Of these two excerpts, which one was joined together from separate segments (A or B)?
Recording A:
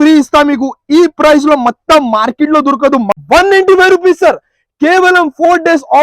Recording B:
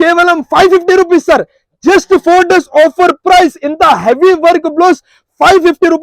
A